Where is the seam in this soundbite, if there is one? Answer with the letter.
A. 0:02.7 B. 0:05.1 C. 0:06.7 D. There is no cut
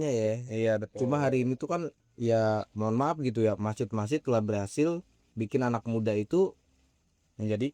D